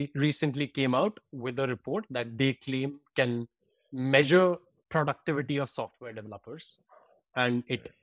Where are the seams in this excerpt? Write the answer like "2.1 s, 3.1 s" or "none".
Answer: none